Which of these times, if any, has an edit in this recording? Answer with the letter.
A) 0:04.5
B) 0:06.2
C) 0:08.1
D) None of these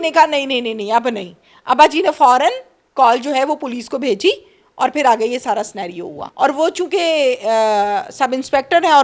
B